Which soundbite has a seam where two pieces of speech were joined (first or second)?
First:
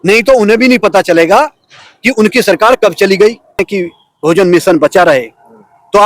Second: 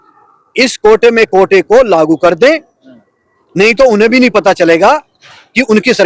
first